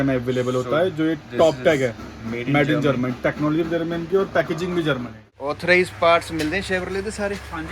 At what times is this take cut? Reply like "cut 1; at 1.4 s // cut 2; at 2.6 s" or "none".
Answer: cut 1; at 5.5 s